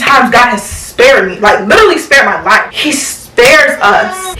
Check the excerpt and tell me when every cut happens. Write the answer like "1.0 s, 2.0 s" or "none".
2.7 s